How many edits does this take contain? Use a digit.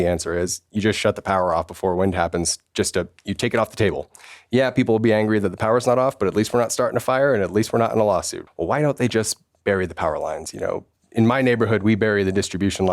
1